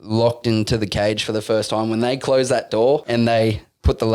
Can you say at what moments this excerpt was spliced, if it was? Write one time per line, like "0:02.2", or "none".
0:03.0